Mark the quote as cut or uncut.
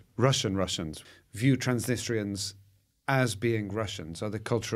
cut